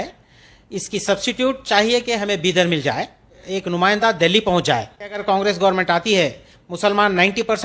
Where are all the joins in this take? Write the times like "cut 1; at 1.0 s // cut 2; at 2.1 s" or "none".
cut 1; at 3.4 s // cut 2; at 5.2 s